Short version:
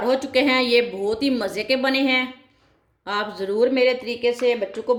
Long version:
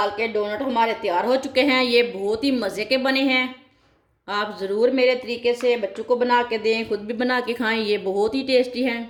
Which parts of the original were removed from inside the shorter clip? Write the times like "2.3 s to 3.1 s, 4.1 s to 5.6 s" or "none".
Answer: none